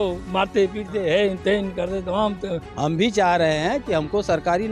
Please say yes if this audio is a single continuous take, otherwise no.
no